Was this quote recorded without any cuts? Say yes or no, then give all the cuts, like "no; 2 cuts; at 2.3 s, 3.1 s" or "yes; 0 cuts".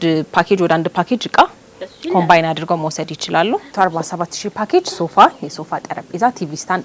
no; 1 cut; at 3.7 s